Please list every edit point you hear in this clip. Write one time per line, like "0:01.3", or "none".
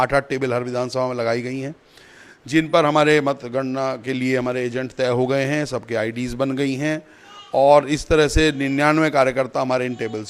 none